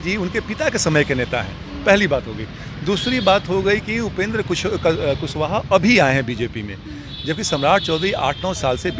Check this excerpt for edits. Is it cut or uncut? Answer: uncut